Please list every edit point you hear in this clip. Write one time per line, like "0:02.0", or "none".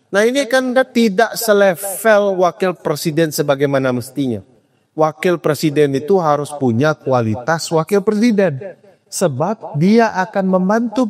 none